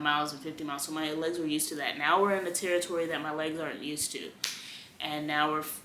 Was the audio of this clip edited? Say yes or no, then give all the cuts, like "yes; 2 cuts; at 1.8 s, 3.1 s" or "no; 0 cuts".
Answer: no; 0 cuts